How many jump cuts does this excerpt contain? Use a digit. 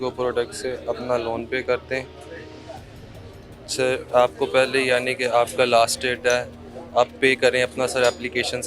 0